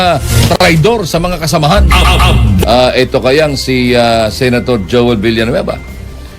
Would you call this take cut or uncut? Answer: cut